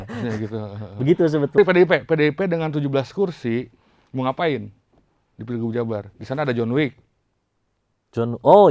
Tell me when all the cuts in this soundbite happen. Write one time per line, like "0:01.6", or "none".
0:01.6